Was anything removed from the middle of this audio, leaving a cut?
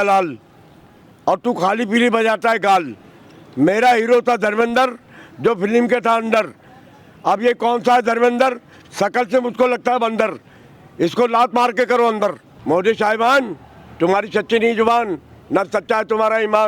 yes; 1 cut; at 12.5 s

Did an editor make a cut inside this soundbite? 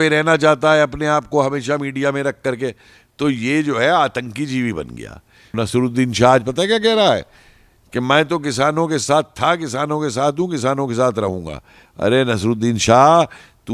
yes; 1 cut; at 5.6 s

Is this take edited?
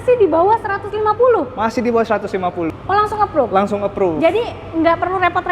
yes; 1 cut; at 2.8 s

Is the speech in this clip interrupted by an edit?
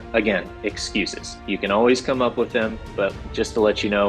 yes; 1 cut; at 3.2 s

